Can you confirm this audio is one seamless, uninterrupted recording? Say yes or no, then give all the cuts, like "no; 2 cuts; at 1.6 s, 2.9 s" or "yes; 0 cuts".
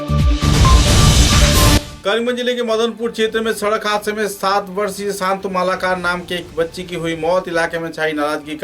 no; 1 cut; at 1.9 s